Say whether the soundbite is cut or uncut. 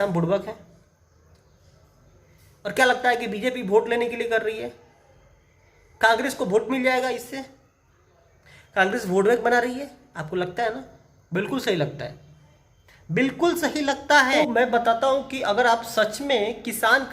cut